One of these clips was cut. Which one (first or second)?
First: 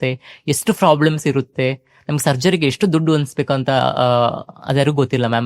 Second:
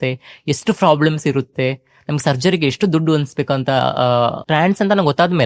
second